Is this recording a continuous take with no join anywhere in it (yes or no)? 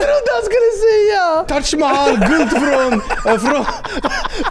no